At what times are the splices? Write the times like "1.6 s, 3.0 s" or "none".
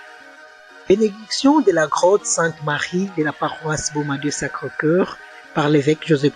none